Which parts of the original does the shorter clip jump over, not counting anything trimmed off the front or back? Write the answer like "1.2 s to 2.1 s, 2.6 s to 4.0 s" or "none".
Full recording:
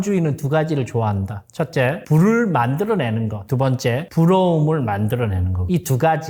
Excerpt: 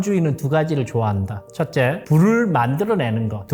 none